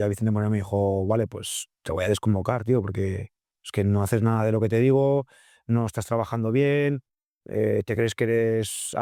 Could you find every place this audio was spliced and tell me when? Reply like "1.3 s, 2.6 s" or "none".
none